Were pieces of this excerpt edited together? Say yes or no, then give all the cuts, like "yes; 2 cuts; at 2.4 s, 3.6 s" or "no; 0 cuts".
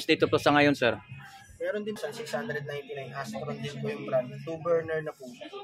yes; 1 cut; at 2.0 s